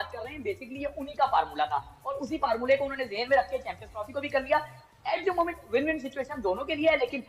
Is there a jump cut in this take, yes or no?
no